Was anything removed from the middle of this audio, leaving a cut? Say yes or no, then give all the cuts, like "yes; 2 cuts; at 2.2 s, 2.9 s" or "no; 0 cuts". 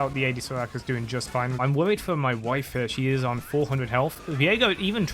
yes; 1 cut; at 1.6 s